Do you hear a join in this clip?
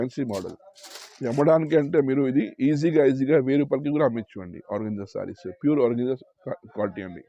no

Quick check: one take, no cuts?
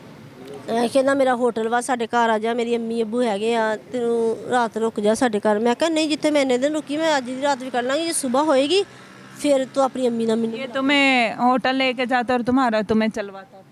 yes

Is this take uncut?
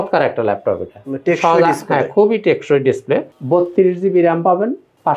no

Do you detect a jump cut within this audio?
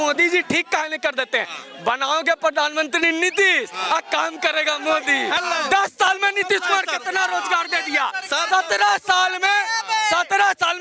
yes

